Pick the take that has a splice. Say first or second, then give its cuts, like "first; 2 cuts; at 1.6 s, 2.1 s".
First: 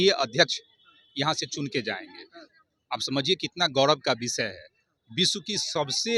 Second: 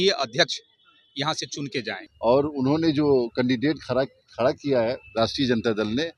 second; 1 cut; at 2.0 s